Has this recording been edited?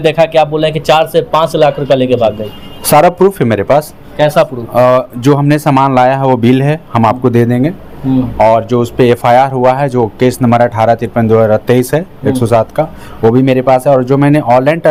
no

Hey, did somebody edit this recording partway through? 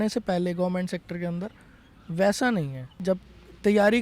yes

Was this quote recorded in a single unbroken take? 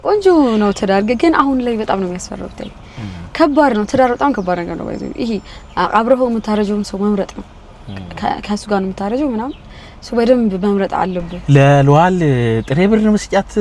no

